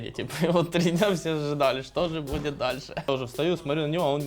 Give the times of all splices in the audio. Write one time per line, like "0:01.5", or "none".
0:03.1